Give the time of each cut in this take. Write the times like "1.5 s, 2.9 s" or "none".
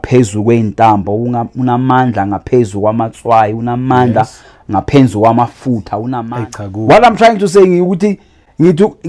6.2 s

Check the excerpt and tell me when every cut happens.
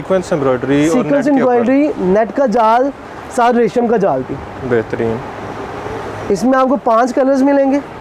none

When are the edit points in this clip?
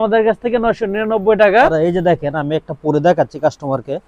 1.7 s

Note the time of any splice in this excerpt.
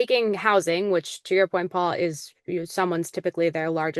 none

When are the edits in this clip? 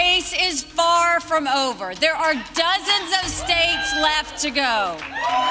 none

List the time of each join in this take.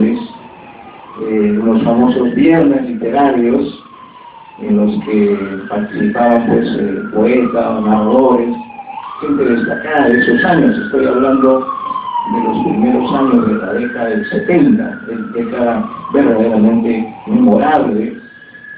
none

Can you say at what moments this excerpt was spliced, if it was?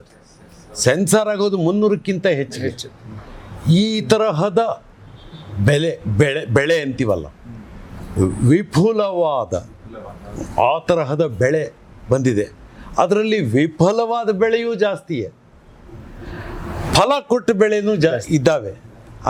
none

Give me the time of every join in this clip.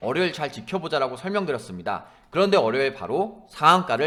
none

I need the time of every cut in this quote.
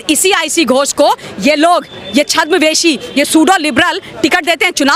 none

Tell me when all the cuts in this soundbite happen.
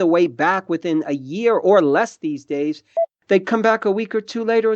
3.0 s

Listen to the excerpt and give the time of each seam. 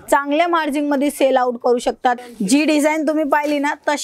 2.2 s

